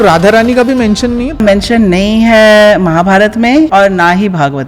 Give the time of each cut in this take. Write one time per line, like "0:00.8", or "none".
0:01.4
0:03.7